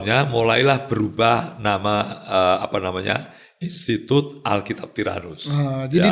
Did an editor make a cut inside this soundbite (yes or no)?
no